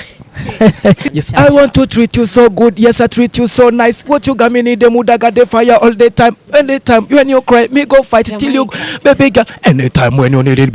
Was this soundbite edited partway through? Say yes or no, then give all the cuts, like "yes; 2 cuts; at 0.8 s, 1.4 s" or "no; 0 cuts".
yes; 1 cut; at 1.0 s